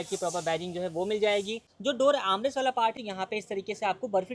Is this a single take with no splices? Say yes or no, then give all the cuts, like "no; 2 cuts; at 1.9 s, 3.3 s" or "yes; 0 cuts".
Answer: no; 2 cuts; at 1.6 s, 2.9 s